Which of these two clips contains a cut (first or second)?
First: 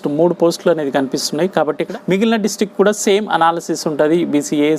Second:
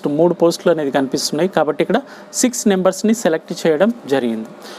first